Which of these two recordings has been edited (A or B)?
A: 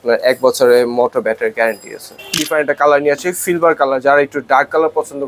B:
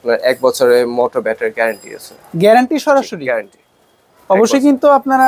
A